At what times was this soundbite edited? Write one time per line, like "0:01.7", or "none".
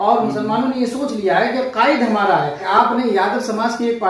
0:02.6